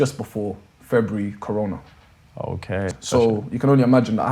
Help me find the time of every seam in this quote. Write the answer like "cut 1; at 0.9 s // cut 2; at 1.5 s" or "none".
cut 1; at 2.9 s